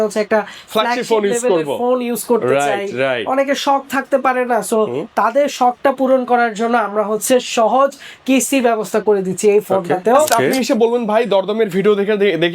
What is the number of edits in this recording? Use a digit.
1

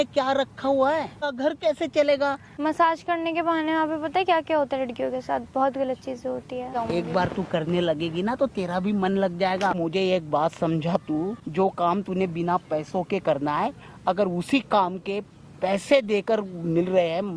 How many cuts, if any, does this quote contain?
5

